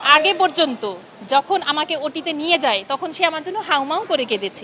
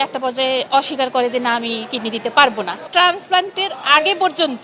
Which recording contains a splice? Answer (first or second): second